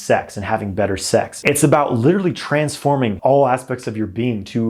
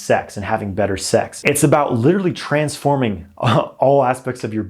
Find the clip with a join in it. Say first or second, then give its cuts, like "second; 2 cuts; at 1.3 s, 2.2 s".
first; 1 cut; at 3.2 s